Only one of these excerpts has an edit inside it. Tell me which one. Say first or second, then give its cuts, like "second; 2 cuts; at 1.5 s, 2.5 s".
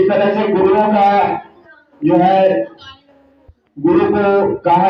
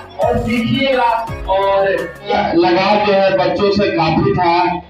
second; 1 cut; at 2.3 s